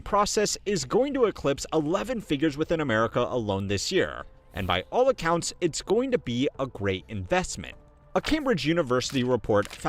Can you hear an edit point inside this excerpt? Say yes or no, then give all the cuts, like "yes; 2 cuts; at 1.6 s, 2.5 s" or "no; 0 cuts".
no; 0 cuts